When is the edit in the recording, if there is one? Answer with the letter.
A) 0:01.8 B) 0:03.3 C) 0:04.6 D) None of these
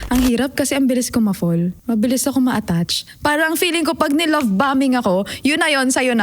A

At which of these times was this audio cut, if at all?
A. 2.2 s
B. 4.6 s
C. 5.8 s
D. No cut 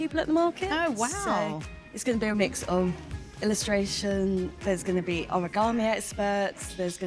B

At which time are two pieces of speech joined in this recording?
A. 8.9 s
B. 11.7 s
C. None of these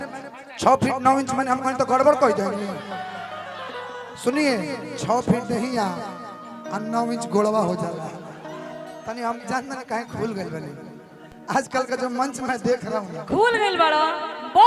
A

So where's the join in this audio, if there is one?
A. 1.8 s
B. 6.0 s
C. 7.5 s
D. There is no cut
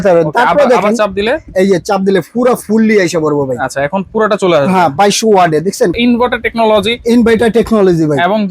B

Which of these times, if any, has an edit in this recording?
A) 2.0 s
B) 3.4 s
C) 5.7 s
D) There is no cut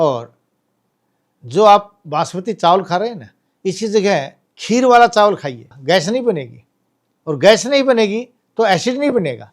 C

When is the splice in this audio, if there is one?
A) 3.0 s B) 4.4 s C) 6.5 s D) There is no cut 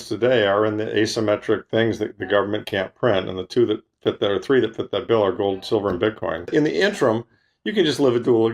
C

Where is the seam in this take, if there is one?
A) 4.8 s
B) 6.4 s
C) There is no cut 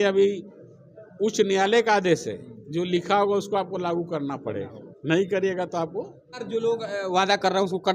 B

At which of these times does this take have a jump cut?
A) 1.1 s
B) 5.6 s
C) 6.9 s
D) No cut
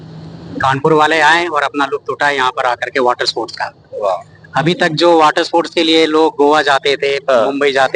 D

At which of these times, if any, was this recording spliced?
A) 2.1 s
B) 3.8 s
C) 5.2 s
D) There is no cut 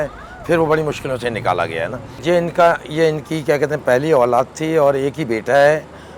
D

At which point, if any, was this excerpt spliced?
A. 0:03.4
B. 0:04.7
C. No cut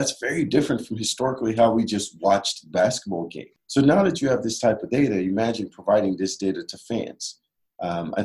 A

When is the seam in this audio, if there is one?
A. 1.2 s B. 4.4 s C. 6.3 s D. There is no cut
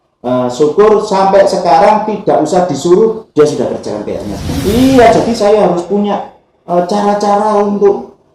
B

